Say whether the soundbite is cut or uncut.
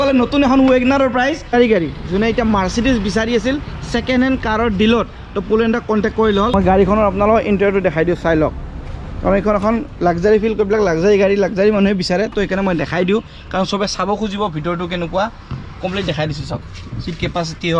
cut